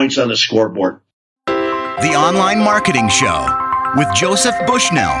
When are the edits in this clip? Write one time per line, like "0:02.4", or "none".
0:01.2